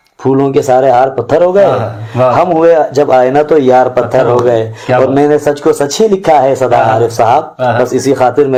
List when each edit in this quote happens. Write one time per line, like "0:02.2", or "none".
none